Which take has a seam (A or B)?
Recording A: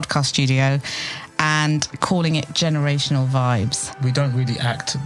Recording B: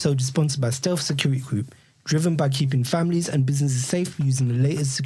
A